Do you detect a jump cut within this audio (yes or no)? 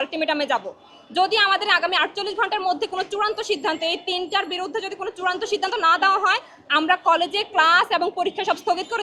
no